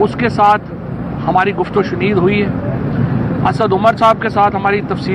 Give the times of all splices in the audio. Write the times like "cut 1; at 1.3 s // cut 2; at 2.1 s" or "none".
none